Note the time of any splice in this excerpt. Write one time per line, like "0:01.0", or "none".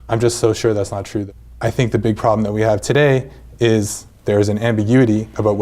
0:01.4